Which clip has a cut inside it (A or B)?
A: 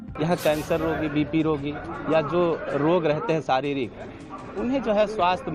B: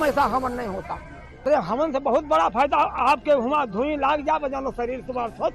B